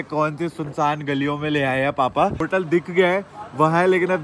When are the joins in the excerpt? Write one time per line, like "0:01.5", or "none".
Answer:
0:02.4

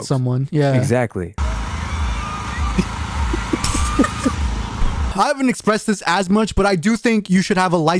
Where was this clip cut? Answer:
0:01.4
0:05.1

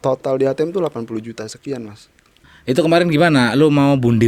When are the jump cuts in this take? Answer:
0:02.4

